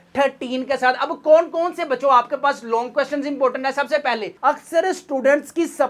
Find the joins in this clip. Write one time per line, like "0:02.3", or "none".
0:04.3

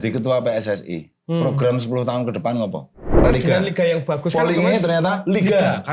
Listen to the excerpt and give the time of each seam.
0:03.2

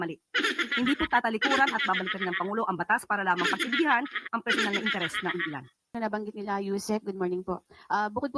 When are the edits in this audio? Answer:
0:05.9

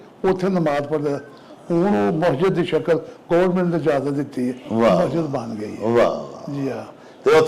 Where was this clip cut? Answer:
none

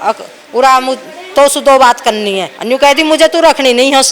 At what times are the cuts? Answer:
0:02.5

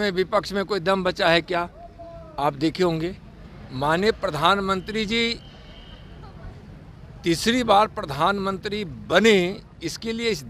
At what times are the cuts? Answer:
none

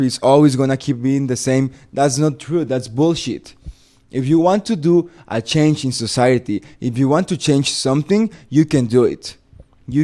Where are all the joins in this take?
none

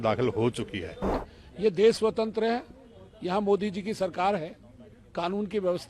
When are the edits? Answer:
0:01.2

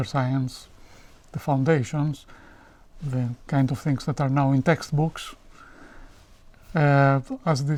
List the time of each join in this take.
none

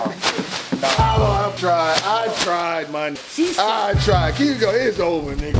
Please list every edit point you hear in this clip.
0:01.6
0:03.2

